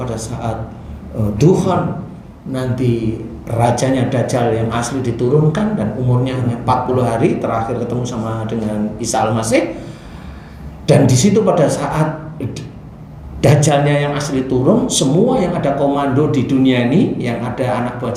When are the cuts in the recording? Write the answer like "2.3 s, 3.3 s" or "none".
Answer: none